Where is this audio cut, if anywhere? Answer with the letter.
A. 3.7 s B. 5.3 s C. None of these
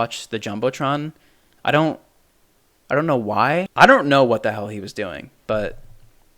A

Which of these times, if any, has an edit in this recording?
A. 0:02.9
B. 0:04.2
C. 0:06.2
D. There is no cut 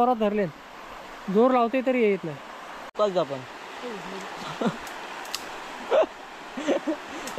A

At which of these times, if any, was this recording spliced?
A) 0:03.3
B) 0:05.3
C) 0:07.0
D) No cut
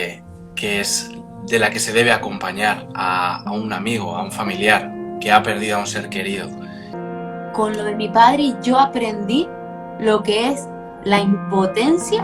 C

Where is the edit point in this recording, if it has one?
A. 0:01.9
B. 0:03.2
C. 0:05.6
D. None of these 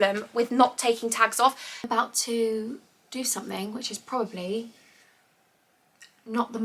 A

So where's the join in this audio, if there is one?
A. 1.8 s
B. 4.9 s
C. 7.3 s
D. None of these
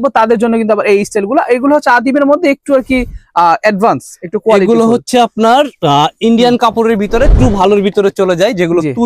C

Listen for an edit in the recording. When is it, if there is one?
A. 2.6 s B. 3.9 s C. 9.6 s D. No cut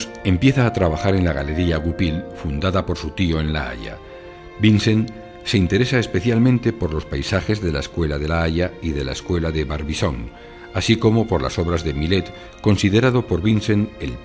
C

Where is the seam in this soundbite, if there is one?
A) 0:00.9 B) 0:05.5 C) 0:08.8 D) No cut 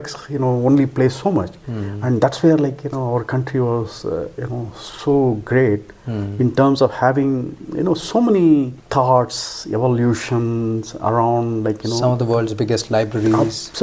C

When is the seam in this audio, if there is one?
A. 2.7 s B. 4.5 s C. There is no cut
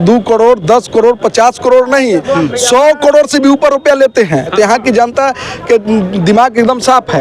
B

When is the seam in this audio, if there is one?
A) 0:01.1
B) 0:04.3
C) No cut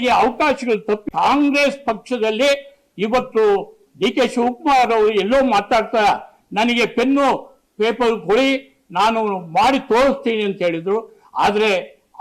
A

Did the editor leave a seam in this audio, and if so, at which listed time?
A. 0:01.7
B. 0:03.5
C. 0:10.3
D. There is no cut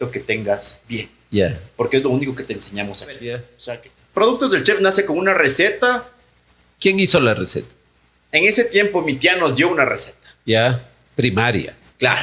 B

